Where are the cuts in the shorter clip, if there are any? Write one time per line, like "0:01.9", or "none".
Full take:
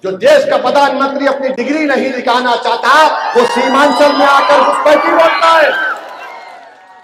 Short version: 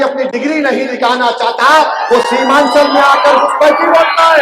none